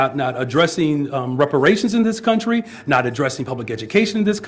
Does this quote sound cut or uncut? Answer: cut